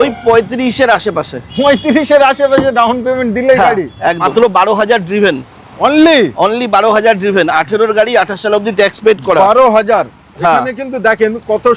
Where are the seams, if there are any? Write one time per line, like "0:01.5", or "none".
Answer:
0:04.2